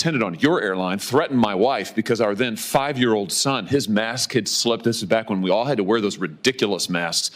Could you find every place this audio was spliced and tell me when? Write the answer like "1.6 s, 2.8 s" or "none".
none